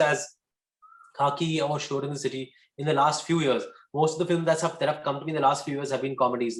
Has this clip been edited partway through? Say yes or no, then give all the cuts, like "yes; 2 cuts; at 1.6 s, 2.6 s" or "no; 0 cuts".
no; 0 cuts